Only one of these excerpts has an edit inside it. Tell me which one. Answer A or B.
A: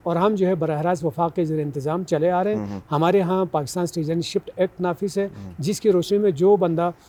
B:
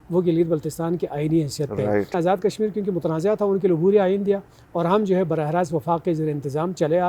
B